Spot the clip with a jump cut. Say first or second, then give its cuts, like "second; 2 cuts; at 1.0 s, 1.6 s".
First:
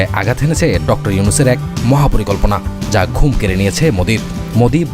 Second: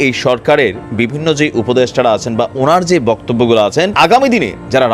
second; 1 cut; at 3.9 s